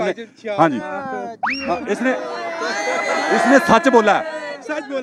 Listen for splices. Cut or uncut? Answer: uncut